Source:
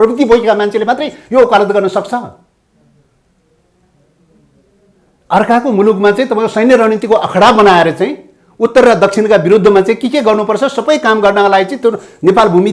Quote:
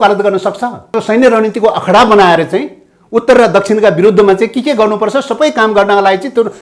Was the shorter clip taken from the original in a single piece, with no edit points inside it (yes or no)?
no